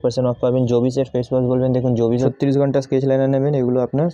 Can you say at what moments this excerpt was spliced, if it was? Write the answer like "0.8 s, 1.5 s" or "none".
2.3 s